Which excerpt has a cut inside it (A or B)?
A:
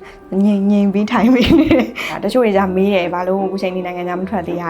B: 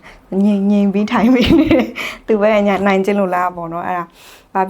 A